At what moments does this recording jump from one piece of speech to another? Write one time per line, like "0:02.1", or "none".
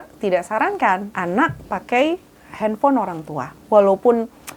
0:01.1